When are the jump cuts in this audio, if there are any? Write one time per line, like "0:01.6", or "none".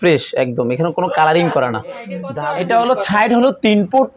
0:02.2